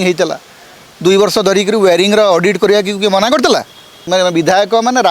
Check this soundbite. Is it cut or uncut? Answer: cut